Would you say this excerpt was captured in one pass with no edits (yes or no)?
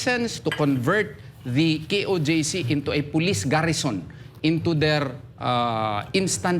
yes